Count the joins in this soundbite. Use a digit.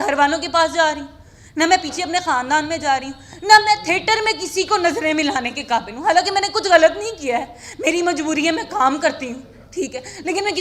0